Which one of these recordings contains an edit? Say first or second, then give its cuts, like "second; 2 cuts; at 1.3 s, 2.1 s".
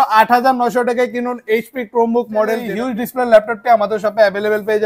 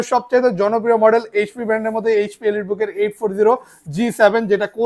first; 1 cut; at 2.7 s